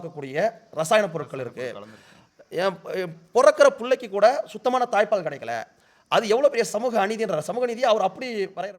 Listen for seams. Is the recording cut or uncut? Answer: uncut